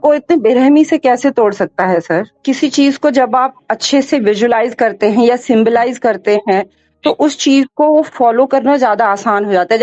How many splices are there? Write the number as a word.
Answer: one